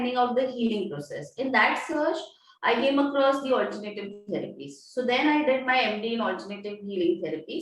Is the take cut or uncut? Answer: uncut